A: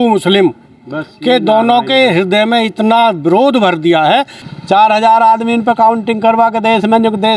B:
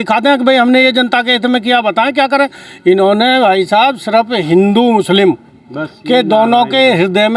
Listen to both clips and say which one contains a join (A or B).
A